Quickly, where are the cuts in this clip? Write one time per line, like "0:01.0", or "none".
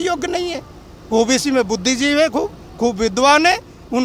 none